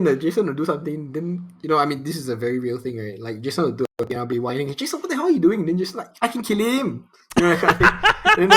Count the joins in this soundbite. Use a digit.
0